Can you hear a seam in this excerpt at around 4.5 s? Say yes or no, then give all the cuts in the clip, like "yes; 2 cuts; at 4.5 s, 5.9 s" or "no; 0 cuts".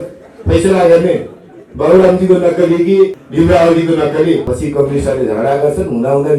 yes; 2 cuts; at 3.2 s, 4.5 s